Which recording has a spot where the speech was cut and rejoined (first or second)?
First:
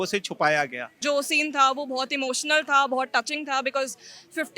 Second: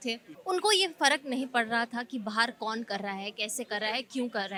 first